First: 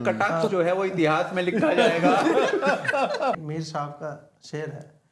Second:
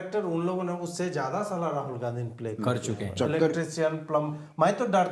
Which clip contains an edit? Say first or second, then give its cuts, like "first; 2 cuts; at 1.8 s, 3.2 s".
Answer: first; 1 cut; at 3.3 s